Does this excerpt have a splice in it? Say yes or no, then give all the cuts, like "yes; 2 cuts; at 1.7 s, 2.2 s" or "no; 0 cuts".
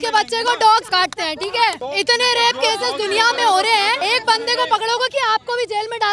yes; 3 cuts; at 0.9 s, 1.8 s, 4.0 s